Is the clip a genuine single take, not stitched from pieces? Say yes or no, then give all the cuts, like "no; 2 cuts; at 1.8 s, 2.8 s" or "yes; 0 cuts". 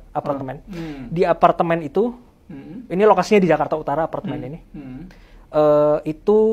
yes; 0 cuts